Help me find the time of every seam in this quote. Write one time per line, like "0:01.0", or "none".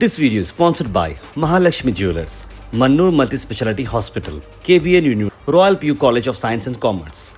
none

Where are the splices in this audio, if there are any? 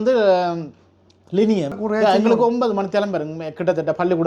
0:01.7

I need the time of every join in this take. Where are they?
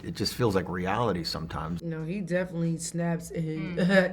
0:01.7

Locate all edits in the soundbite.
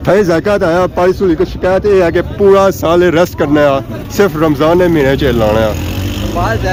none

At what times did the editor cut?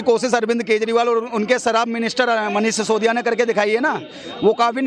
none

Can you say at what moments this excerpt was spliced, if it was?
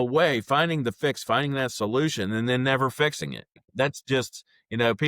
0:03.6

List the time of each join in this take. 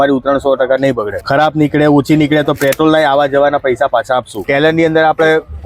0:01.2
0:04.4

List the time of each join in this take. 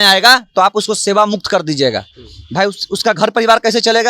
none

